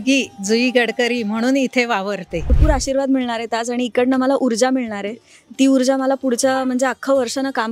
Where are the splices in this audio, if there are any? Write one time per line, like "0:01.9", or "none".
0:02.6